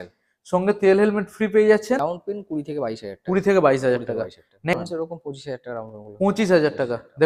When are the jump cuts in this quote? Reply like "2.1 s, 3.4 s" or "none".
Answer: 2.0 s, 4.7 s

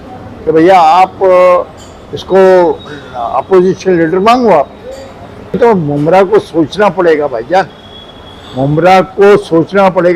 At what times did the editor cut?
5.6 s

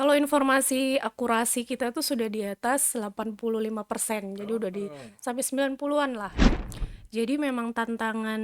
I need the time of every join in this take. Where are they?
6.5 s

